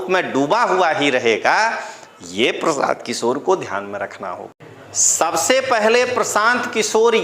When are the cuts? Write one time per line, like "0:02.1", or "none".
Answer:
0:04.5